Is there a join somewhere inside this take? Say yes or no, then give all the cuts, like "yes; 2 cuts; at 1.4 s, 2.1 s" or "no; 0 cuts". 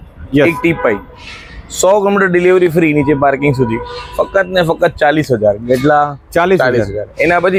no; 0 cuts